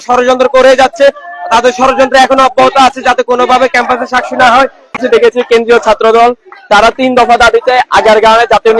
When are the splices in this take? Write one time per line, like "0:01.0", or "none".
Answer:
0:05.0